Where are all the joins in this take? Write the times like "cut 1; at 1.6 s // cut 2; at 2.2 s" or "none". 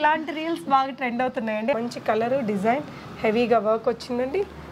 cut 1; at 1.7 s